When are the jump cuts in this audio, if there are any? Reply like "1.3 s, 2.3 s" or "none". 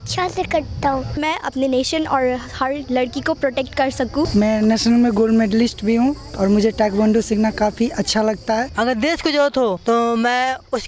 1.2 s, 4.3 s, 8.7 s, 9.8 s